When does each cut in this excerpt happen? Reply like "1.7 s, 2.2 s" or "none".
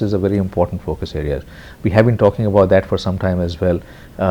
none